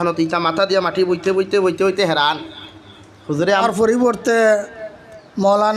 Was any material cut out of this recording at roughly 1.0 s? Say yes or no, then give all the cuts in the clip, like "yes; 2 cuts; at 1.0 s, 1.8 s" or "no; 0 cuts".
no; 1 cut; at 3.6 s